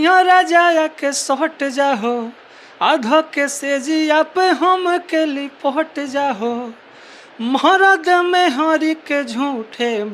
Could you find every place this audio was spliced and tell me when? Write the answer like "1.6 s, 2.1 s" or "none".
none